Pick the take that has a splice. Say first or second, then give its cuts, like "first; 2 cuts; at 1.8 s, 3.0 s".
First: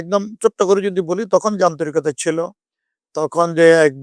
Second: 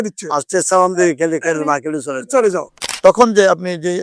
second; 1 cut; at 2.8 s